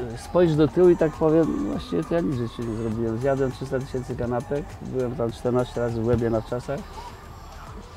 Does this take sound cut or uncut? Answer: uncut